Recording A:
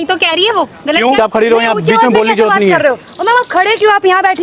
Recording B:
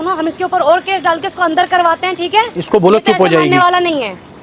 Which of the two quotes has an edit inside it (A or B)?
A